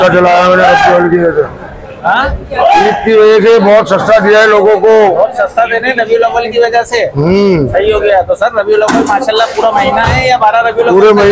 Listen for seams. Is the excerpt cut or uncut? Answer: uncut